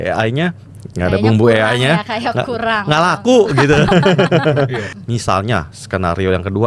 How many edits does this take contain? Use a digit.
1